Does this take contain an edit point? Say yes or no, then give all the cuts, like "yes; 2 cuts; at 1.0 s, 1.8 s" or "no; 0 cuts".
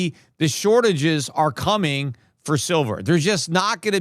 no; 0 cuts